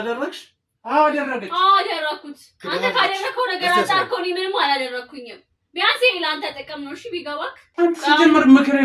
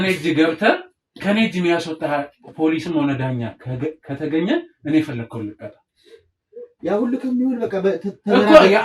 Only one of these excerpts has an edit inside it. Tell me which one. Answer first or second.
first